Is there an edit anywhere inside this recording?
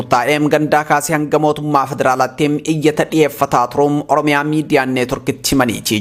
no; 0 cuts

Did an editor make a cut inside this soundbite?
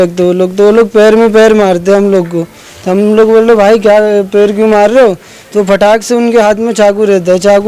no; 0 cuts

